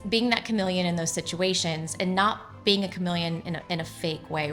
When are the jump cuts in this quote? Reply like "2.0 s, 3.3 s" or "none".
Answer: none